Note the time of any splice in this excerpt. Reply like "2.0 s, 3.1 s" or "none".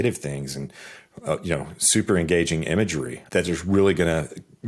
3.2 s

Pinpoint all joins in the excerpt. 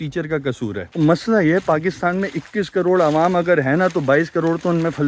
0.9 s

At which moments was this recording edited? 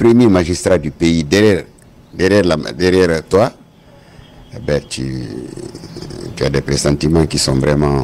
none

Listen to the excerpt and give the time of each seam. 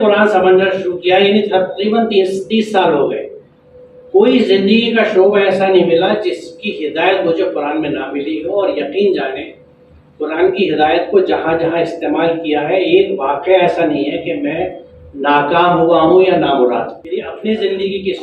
17.0 s

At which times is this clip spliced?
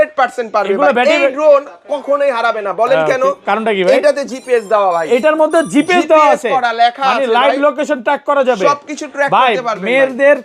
none

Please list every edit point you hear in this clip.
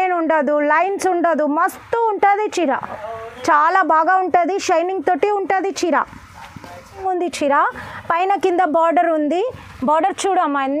7.0 s

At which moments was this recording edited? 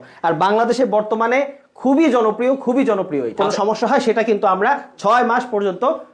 3.4 s

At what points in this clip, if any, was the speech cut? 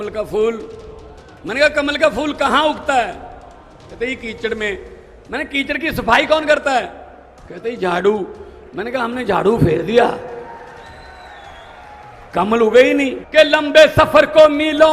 13.2 s

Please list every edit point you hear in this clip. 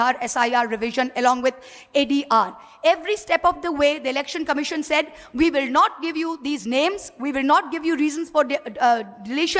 none

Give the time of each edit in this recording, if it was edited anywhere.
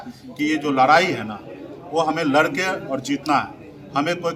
none

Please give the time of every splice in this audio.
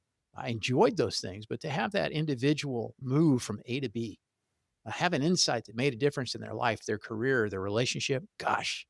none

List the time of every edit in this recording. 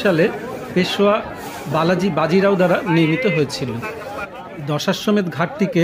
4.3 s

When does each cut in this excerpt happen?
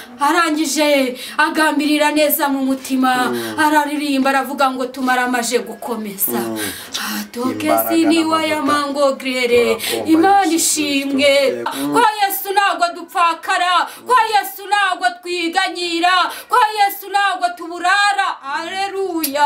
11.7 s

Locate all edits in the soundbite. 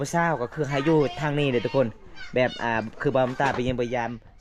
none

